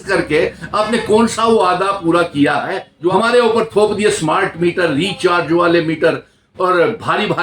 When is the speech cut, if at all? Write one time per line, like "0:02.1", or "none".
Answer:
0:03.1